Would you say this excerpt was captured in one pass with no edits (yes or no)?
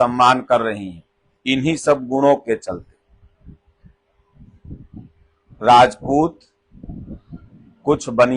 yes